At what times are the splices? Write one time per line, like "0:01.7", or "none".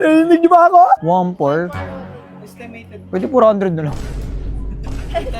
0:01.0